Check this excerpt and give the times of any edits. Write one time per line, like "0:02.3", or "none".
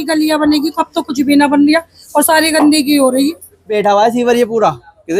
0:03.7